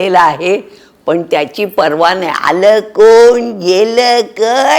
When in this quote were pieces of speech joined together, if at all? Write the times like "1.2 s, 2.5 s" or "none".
none